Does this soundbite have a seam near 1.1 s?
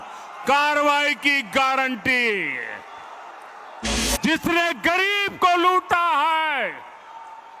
no; 1 cut; at 4.0 s

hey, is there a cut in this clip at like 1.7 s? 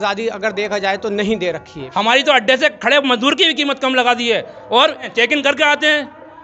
yes; 2 cuts; at 1.7 s, 5.1 s

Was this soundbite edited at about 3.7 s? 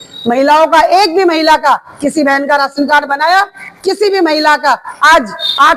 no; 0 cuts

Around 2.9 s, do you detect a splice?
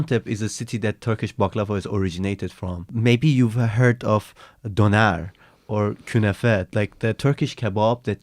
yes; 1 cut; at 2.9 s

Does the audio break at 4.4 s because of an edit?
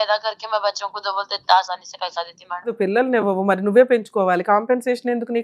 no; 1 cut; at 2.7 s

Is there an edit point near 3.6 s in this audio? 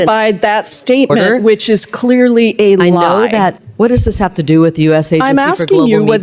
yes; 1 cut; at 3.6 s

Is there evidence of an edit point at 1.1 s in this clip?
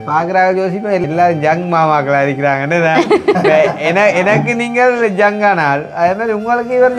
yes; 1 cut; at 1.1 s

